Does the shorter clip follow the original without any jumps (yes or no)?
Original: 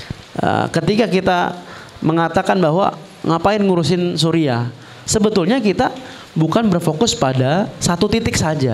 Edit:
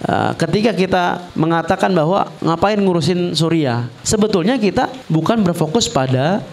no